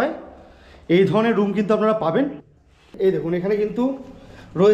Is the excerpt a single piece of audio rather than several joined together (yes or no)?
no